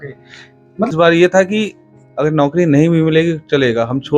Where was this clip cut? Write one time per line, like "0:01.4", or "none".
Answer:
0:00.9